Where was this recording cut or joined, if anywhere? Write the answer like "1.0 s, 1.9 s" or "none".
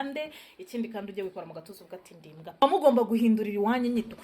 2.6 s